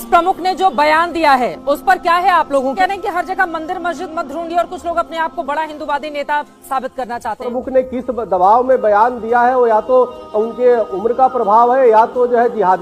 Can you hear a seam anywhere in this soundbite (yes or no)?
yes